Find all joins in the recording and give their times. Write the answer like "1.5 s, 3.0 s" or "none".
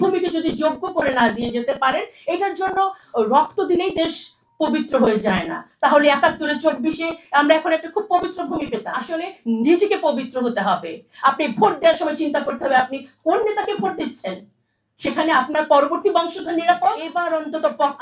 9.0 s, 17.1 s